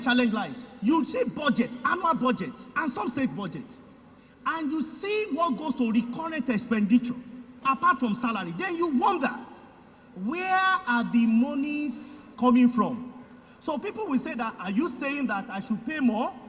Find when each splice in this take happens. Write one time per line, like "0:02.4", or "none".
0:07.6